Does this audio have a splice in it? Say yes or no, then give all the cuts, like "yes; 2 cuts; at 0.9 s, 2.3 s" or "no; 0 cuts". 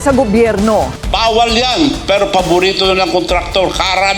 yes; 1 cut; at 1.0 s